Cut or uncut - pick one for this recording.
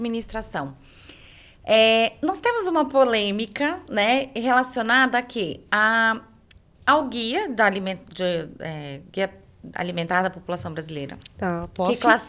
uncut